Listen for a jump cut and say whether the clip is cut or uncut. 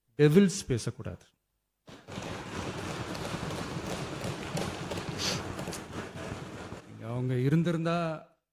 uncut